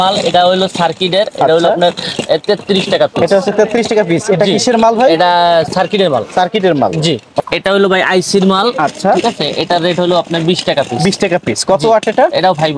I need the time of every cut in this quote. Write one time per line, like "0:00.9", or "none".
none